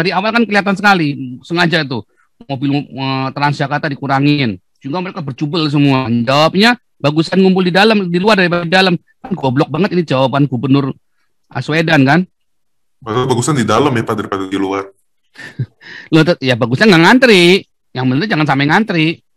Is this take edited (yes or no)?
no